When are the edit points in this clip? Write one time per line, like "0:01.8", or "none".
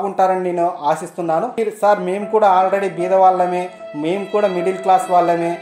0:01.6